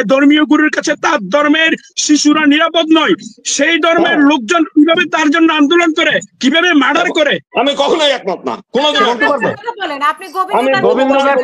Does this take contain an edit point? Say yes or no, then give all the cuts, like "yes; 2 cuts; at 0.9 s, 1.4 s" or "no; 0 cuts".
yes; 1 cut; at 7.4 s